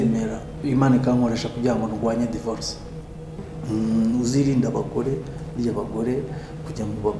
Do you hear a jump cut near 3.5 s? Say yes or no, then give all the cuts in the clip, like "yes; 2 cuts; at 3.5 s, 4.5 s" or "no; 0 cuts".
yes; 1 cut; at 3.5 s